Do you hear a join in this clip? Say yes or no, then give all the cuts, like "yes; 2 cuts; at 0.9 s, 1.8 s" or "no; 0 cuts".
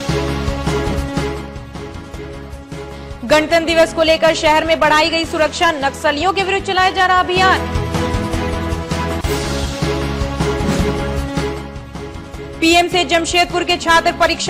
yes; 1 cut; at 0.9 s